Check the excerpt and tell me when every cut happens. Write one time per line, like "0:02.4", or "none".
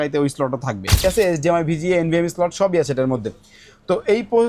0:01.0